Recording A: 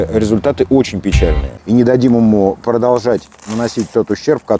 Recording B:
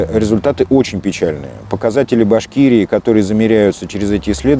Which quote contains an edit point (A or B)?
A